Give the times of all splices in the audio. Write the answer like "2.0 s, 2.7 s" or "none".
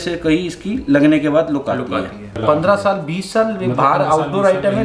2.4 s